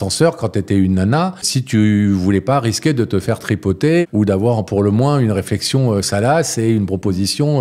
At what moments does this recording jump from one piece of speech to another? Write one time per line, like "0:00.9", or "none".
0:01.5
0:04.0